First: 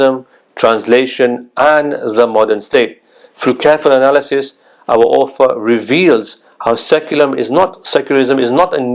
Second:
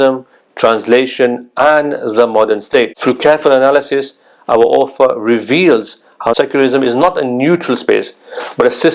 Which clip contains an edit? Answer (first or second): second